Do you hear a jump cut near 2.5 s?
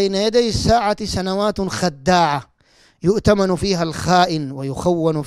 no; 0 cuts

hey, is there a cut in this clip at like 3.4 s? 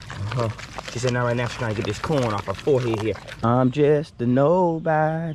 yes; 1 cut; at 3.4 s

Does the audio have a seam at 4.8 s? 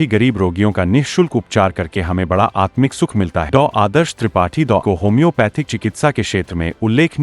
yes; 2 cuts; at 3.5 s, 4.8 s

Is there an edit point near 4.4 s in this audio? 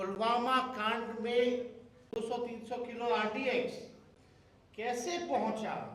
no; 1 cut; at 2.1 s

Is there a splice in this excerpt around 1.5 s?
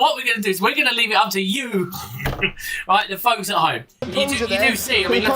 no; 1 cut; at 4.0 s

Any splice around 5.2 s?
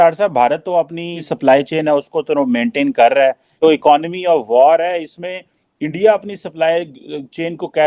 no; 2 cuts; at 1.2 s, 3.5 s

